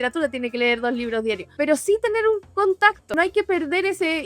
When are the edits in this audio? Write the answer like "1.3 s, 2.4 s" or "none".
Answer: 1.5 s, 2.8 s

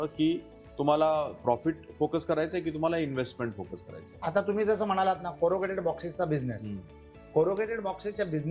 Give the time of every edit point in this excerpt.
none

